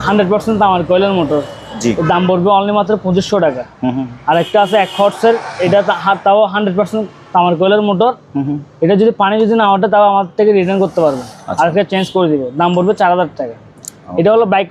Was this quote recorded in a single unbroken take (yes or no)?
yes